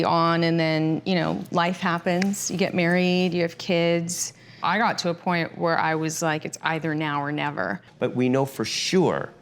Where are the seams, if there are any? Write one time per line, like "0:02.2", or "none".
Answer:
0:04.6
0:07.8